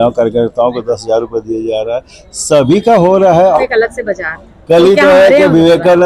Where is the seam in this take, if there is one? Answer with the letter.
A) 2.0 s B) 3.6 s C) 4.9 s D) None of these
B